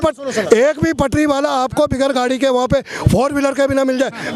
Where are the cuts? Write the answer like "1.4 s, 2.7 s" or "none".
none